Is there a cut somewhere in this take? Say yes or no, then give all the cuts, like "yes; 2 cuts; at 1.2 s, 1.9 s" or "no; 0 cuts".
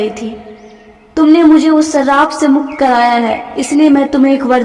no; 0 cuts